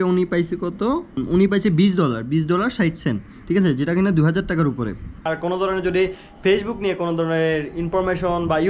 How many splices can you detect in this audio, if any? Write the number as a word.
two